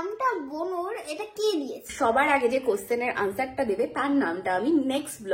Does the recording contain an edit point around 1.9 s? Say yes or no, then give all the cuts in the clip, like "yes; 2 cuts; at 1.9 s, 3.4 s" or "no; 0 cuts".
yes; 1 cut; at 1.9 s